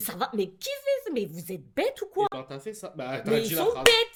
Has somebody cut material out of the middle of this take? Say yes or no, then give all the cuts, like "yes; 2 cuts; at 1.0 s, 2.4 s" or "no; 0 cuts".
no; 0 cuts